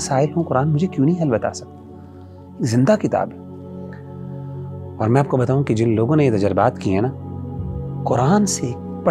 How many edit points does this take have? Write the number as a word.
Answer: zero